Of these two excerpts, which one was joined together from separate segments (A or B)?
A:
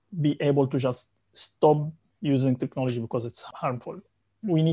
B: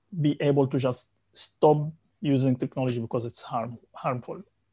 A